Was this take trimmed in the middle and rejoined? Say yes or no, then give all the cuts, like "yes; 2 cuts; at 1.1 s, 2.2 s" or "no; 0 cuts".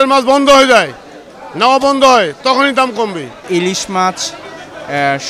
yes; 1 cut; at 3.4 s